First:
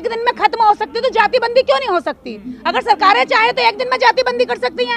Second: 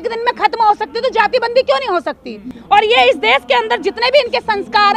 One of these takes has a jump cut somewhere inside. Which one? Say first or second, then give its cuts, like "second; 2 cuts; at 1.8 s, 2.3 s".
second; 1 cut; at 2.5 s